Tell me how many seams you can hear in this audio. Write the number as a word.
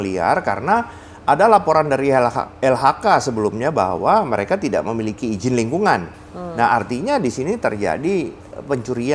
one